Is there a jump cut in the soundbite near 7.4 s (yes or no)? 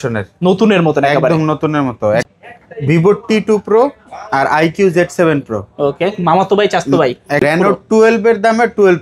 yes